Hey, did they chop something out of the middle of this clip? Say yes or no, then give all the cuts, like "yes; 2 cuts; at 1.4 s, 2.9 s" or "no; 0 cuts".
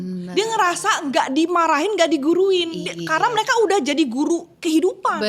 no; 0 cuts